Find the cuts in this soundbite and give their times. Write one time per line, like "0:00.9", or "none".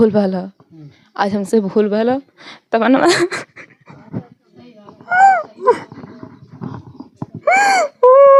none

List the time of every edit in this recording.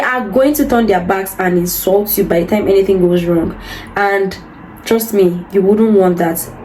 none

